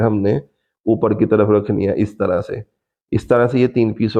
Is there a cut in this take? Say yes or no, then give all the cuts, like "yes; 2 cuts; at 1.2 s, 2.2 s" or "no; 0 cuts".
no; 0 cuts